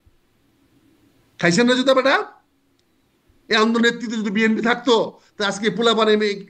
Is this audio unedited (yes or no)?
yes